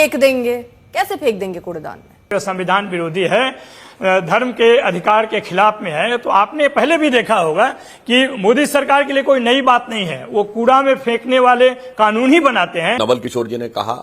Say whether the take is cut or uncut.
cut